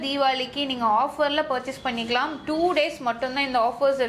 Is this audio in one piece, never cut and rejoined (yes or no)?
yes